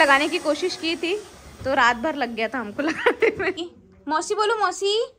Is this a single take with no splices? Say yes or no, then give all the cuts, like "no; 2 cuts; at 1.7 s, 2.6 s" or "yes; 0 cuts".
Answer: no; 1 cut; at 3.6 s